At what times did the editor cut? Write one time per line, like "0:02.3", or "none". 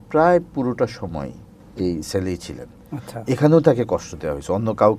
0:01.6